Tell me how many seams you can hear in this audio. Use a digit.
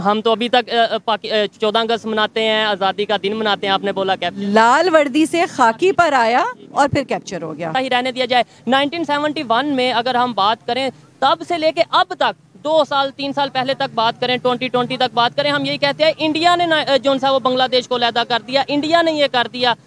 1